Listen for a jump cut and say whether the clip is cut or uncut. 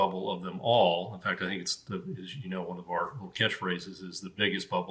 uncut